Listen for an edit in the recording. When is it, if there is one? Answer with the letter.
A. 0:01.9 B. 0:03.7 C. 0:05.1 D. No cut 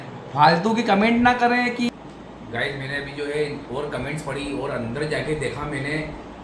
A